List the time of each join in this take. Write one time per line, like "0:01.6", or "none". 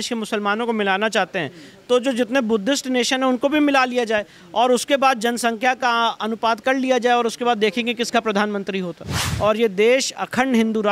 0:09.2